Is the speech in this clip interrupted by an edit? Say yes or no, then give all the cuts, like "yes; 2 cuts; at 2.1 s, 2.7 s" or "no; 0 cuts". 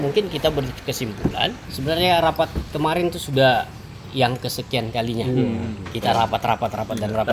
yes; 1 cut; at 1.7 s